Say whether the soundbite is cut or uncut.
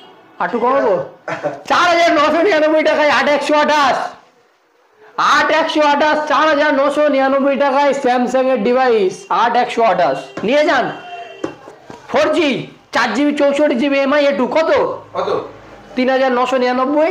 uncut